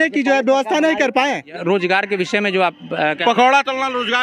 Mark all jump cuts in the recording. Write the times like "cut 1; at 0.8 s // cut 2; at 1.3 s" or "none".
cut 1; at 1.5 s